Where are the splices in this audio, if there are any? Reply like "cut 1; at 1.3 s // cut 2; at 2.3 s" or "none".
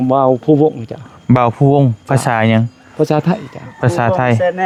none